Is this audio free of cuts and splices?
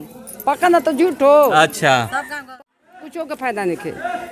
no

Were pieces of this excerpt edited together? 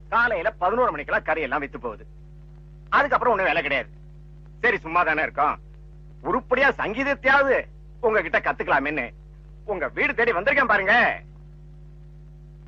no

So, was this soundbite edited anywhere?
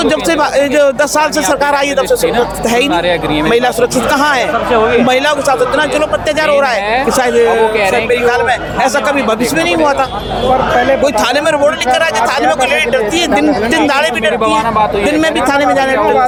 no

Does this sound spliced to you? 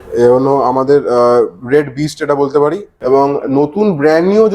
yes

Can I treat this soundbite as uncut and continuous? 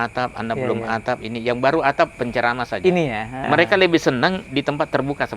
no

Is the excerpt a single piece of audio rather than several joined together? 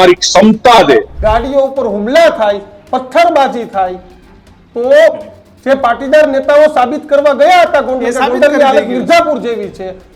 no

